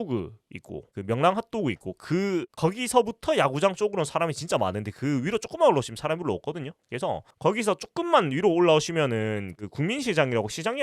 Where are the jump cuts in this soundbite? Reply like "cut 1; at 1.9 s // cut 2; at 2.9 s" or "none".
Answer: cut 1; at 7.3 s